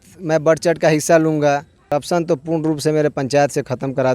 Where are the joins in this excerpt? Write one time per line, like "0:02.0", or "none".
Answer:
0:01.8